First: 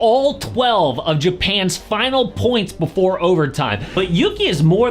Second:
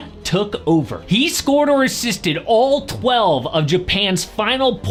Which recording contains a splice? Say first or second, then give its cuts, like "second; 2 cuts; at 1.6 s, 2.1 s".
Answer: first; 1 cut; at 3.8 s